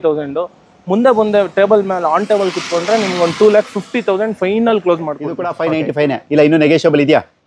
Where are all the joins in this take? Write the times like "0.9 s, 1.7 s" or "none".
5.4 s